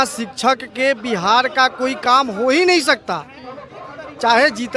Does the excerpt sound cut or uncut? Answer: uncut